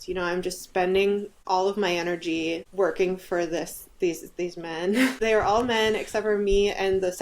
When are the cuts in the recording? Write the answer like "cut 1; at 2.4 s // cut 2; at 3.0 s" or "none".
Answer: cut 1; at 1.3 s // cut 2; at 2.7 s // cut 3; at 5.1 s